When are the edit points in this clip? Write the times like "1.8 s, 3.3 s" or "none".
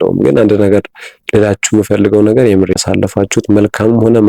2.7 s